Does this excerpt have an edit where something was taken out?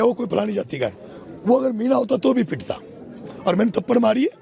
no; 0 cuts

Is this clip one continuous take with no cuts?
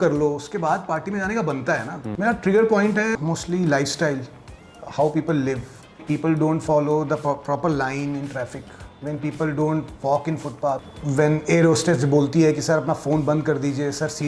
no; 4 cuts; at 2.1 s, 3.1 s, 6.0 s, 10.9 s

